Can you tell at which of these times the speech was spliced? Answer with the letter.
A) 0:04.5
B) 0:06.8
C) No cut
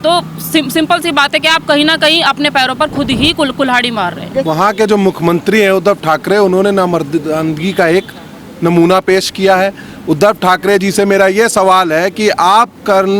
A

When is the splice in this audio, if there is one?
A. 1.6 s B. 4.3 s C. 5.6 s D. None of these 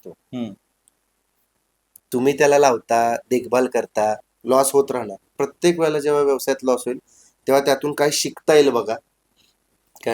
B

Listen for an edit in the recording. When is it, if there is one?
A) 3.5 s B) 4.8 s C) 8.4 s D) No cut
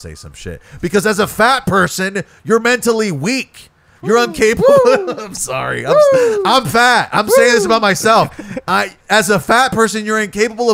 D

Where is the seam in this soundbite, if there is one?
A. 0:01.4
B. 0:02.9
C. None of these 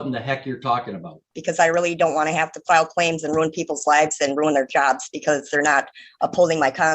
A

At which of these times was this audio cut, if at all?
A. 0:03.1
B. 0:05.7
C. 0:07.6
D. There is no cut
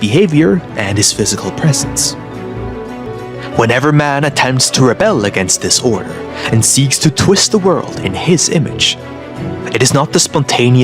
A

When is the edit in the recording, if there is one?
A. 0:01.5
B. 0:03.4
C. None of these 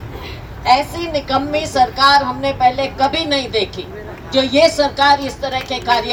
C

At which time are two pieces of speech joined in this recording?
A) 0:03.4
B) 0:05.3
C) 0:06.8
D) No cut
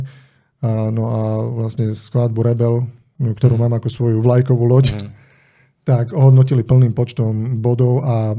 D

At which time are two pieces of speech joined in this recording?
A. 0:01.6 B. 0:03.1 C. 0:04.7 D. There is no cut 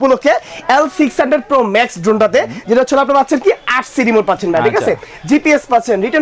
D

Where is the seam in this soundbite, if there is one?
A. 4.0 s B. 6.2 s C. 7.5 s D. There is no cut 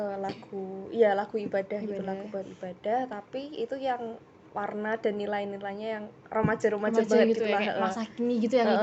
D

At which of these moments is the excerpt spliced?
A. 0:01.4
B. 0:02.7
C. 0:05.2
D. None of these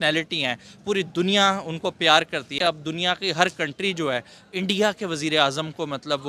B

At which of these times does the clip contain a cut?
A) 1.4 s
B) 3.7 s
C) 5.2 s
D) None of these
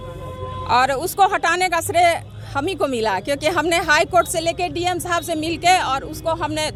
D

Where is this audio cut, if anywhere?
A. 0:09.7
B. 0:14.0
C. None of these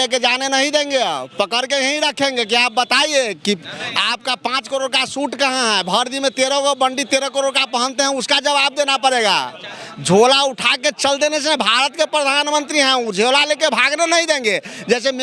C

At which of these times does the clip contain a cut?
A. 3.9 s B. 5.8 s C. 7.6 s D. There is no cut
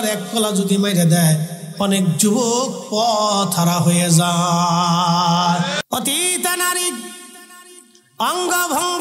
B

